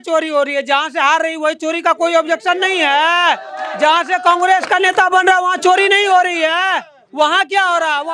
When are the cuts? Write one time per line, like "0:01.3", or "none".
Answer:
none